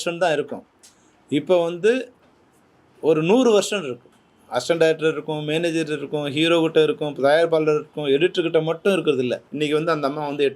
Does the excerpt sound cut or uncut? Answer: cut